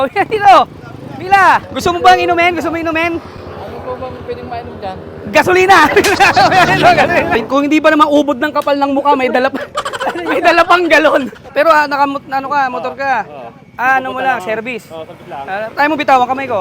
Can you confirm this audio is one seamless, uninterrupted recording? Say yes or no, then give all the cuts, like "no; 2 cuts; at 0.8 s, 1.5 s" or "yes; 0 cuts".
no; 2 cuts; at 7.4 s, 11.4 s